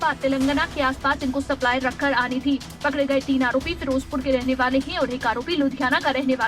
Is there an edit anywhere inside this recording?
yes; 1 cut; at 2.7 s

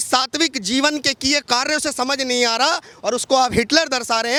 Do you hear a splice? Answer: no; 0 cuts

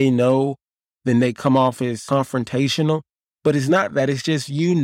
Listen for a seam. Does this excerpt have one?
yes; 1 cut; at 2.0 s

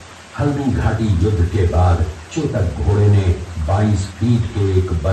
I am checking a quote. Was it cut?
no; 0 cuts

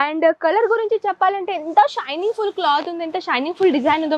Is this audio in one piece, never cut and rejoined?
yes; 0 cuts

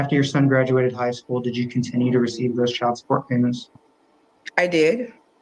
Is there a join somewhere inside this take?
no; 0 cuts

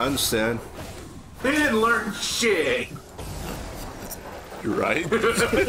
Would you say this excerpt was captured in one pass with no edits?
no; 1 cut; at 3.0 s

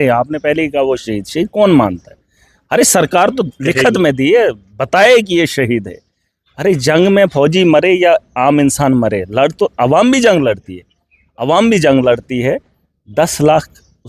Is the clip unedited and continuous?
yes; 0 cuts

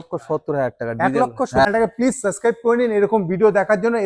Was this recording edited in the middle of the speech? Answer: yes; 1 cut; at 1.7 s

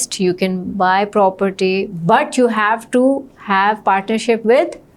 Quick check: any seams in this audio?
no; 0 cuts

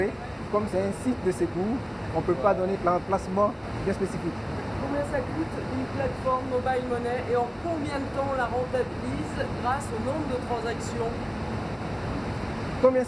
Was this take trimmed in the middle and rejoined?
no; 0 cuts

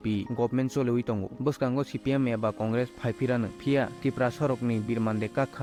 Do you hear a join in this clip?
no; 0 cuts

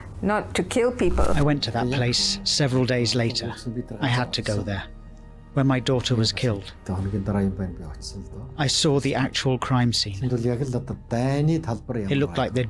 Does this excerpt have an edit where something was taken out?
yes; 1 cut; at 1.3 s

